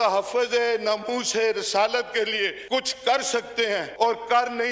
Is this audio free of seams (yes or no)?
no